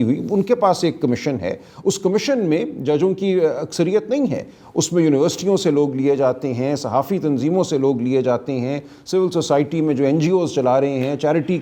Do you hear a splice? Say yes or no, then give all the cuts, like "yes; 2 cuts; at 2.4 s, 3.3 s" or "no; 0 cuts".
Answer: no; 0 cuts